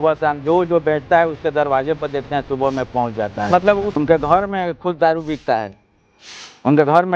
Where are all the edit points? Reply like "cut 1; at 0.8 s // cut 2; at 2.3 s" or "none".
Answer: cut 1; at 4.0 s